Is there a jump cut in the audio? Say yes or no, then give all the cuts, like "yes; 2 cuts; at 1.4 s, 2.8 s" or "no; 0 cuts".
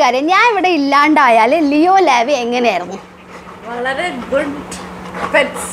no; 0 cuts